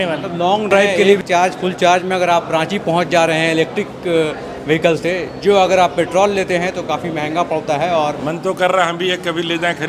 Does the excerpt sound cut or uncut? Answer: cut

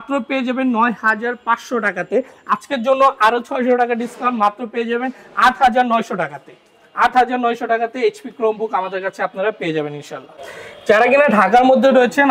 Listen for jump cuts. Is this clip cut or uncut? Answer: uncut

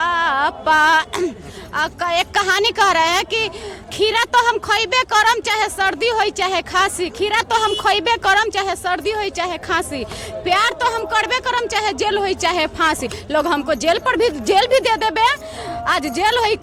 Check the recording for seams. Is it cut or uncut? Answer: uncut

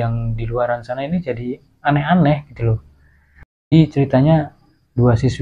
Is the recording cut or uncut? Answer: cut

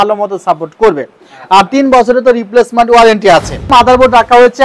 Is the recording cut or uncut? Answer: cut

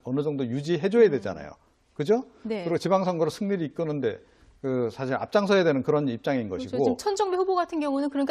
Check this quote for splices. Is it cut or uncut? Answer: cut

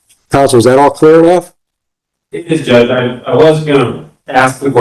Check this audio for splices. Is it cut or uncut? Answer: uncut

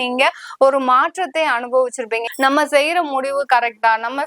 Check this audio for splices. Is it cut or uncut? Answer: cut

